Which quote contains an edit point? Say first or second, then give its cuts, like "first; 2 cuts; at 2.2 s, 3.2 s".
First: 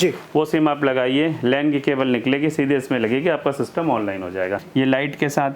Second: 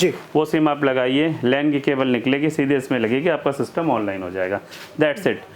first; 1 cut; at 4.6 s